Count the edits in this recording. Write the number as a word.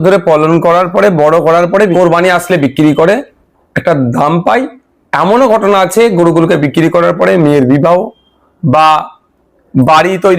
one